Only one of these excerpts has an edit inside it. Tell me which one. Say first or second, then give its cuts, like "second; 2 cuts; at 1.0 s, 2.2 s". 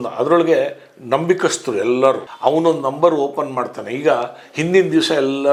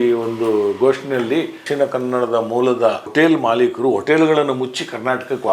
second; 2 cuts; at 1.6 s, 3.1 s